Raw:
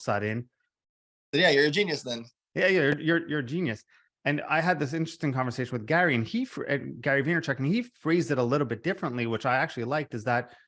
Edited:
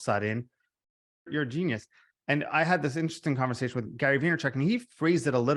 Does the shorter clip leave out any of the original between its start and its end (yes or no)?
yes